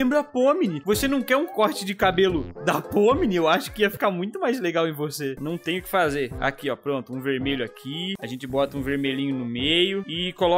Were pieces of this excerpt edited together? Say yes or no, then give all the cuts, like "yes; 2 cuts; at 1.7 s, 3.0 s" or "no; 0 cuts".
yes; 1 cut; at 5.3 s